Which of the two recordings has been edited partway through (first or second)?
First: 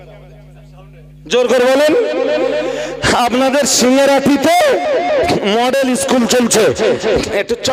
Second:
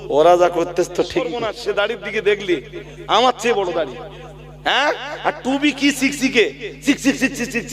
second